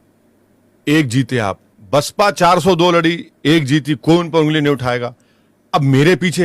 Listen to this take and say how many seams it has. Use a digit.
1